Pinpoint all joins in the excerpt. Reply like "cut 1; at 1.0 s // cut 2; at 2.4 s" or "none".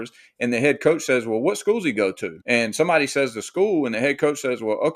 cut 1; at 2.3 s